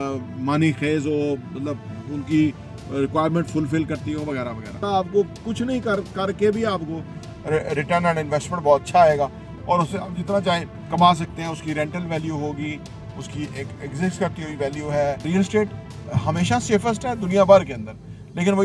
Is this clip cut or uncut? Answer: cut